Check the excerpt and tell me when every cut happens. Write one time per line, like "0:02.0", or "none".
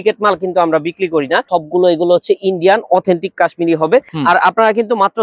0:01.5
0:04.1